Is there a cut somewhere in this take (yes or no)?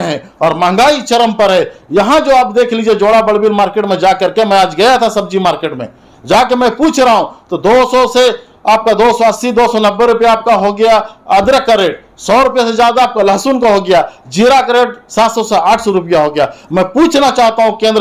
no